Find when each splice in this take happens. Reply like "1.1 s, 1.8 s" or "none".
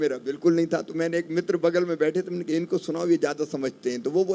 none